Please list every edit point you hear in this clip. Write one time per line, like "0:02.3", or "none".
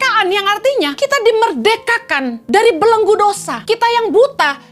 0:00.9
0:02.4
0:03.5

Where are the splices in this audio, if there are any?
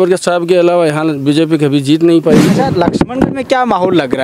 0:02.6

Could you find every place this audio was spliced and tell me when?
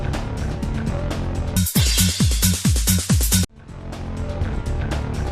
none

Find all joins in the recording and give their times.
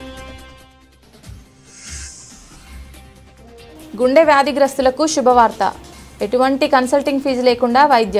0:01.6

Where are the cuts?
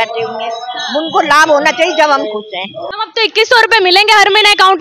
0:02.8

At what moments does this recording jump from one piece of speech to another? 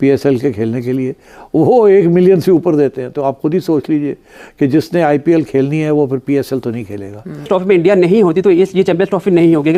0:07.5

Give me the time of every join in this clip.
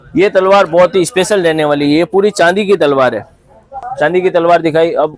0:03.8

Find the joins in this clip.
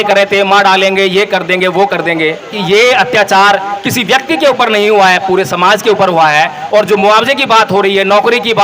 0:02.6

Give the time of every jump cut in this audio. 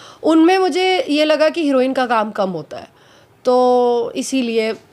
none

